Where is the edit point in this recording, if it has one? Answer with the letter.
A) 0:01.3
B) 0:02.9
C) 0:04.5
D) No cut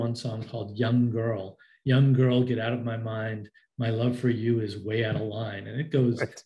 D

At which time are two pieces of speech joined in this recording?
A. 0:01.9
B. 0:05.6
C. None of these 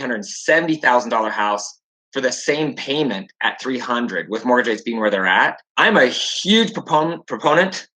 B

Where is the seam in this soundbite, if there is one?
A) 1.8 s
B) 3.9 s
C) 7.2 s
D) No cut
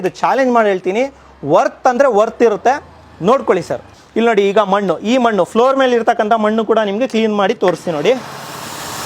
B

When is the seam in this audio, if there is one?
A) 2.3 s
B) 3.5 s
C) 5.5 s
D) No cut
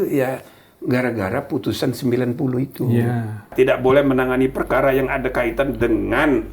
B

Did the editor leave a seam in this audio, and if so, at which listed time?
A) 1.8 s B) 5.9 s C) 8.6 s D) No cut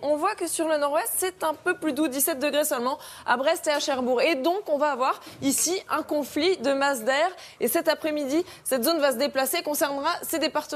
A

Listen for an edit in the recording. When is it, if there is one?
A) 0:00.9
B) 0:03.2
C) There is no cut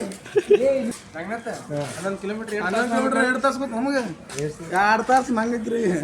A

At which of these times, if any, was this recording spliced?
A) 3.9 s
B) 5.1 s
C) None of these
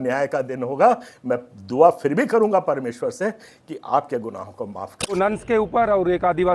B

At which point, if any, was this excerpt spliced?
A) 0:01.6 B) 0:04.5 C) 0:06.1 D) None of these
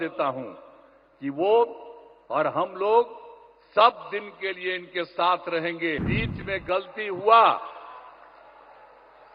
C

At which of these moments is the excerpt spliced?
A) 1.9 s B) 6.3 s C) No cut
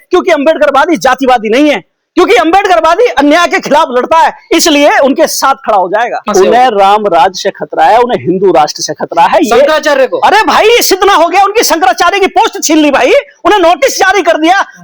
B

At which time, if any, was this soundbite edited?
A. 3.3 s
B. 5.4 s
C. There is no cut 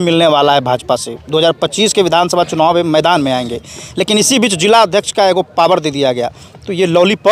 C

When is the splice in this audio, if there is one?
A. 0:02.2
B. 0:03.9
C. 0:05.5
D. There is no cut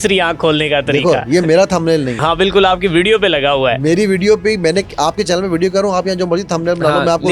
A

